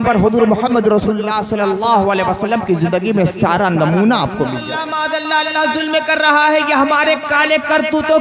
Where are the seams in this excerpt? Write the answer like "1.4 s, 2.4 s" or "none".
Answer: 4.8 s